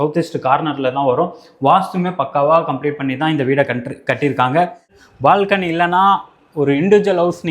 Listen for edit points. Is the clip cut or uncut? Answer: cut